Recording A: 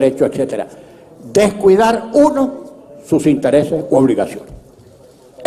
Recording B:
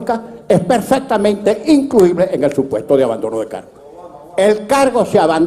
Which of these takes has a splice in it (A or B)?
B